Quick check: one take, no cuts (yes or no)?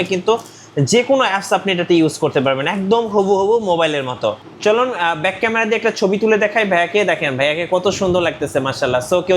no